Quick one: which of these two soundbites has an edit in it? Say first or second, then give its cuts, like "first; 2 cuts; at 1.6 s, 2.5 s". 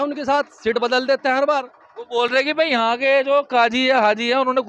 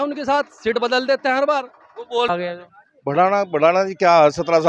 second; 1 cut; at 2.3 s